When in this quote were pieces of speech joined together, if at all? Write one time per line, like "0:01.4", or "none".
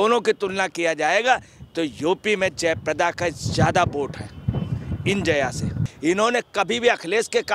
0:05.8